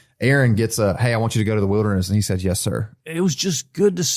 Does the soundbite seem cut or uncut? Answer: cut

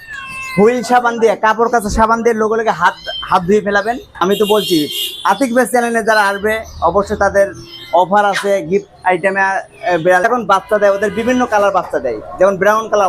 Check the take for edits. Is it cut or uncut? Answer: cut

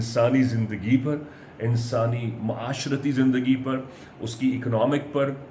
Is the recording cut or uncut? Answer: uncut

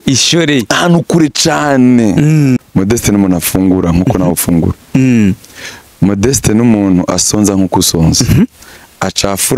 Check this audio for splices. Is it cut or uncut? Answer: cut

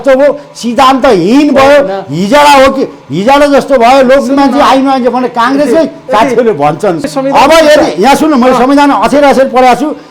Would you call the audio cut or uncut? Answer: cut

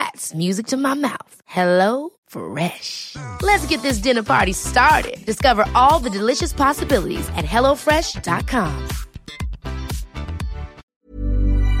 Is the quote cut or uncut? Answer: cut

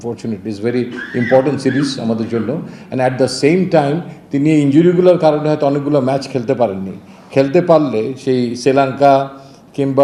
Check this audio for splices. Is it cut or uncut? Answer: uncut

